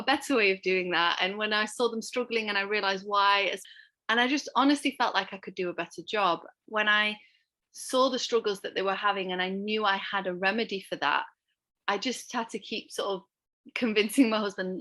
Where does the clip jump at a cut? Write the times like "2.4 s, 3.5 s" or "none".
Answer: 3.6 s, 6.5 s

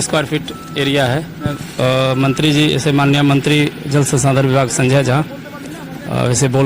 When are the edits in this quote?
1.6 s

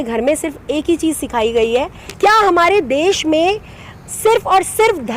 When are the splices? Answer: 2.0 s

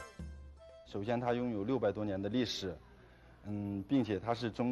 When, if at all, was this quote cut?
none

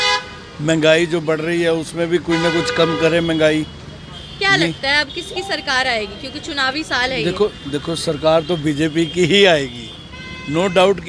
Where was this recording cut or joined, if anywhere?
none

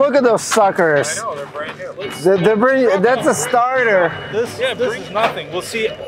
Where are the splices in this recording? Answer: 4.7 s

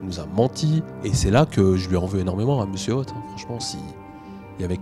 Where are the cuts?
0.9 s

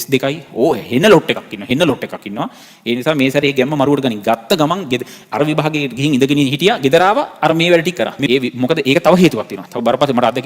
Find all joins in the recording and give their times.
8.2 s

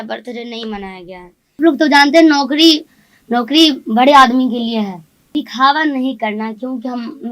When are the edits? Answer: 1.6 s, 5.3 s

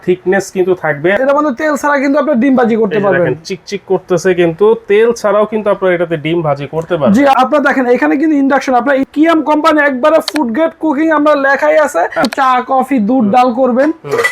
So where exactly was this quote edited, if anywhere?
1.2 s, 7.3 s, 9.0 s, 12.3 s

